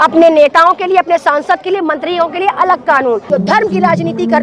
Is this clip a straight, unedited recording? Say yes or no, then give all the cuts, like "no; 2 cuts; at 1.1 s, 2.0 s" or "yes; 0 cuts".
no; 1 cut; at 3.2 s